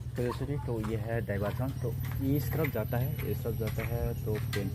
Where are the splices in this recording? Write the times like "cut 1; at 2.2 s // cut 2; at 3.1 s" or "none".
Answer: none